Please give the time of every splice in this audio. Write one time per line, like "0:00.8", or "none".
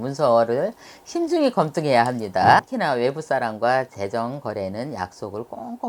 0:02.6